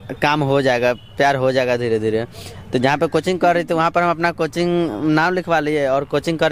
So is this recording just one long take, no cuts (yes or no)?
yes